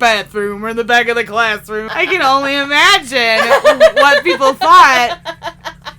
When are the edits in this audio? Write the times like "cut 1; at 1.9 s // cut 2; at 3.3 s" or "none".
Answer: cut 1; at 1.8 s

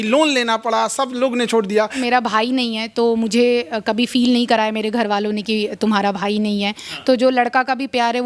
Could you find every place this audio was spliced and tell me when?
cut 1; at 2.0 s

